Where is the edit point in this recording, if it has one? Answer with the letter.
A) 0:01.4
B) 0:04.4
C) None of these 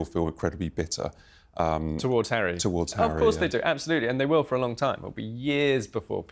C